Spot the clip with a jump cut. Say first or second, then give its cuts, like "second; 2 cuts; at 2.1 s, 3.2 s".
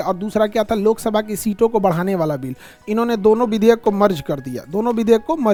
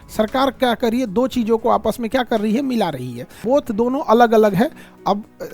second; 1 cut; at 3.3 s